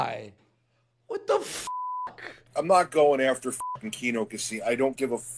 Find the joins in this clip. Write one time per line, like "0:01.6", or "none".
0:02.4